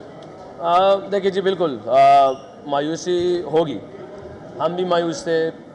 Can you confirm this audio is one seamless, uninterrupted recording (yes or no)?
yes